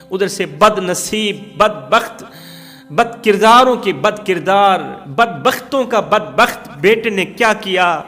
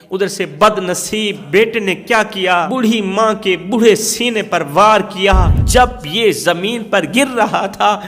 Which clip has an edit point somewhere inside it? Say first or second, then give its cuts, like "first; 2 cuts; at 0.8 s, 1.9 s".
second; 3 cuts; at 1.4 s, 2.7 s, 5.5 s